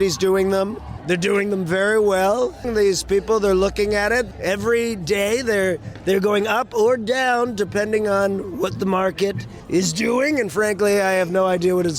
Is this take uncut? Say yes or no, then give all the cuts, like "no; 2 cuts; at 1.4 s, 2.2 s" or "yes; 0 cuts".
no; 4 cuts; at 0.9 s, 2.7 s, 4.3 s, 9.5 s